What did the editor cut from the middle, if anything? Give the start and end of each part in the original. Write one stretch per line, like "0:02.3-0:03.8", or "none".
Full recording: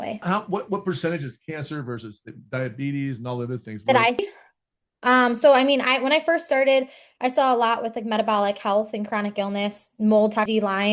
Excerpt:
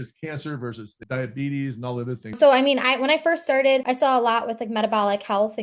0:02.2-0:02.3
0:03.8-0:05.4
0:06.9-0:07.2